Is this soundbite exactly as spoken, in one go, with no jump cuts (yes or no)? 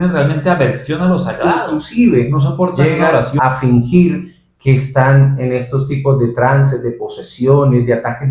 no